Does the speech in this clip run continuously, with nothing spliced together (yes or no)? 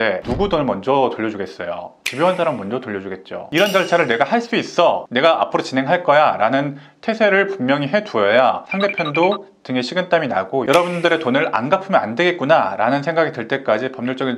no